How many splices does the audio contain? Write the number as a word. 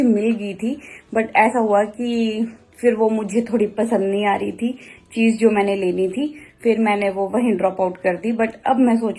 zero